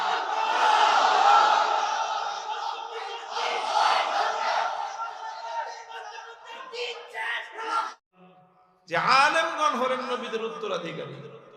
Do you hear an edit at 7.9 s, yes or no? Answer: yes